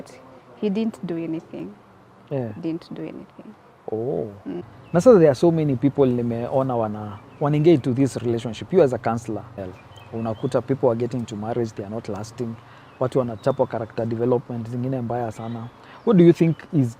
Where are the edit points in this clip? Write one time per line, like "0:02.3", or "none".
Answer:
0:04.6